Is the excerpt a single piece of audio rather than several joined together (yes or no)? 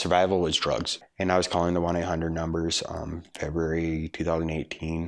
no